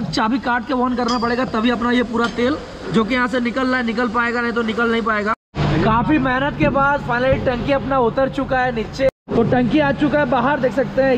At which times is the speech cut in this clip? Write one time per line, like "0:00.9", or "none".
0:05.5
0:09.1